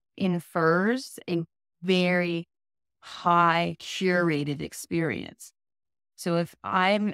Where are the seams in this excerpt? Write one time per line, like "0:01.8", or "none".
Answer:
none